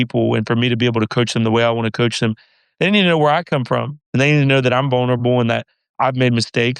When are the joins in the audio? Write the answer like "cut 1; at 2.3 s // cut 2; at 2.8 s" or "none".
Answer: none